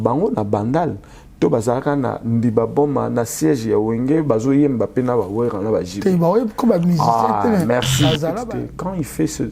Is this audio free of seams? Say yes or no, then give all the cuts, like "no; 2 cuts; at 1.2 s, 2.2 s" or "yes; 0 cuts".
no; 1 cut; at 8.4 s